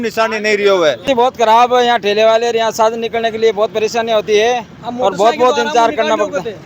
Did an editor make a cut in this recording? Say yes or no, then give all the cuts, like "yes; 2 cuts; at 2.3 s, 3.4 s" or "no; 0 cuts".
yes; 1 cut; at 1.2 s